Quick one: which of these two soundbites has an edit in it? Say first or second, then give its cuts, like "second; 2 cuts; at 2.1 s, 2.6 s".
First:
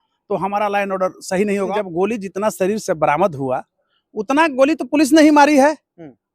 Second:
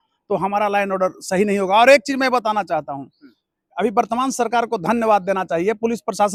first; 1 cut; at 1.7 s